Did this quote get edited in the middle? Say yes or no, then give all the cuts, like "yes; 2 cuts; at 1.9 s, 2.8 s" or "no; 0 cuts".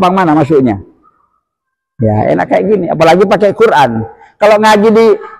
no; 0 cuts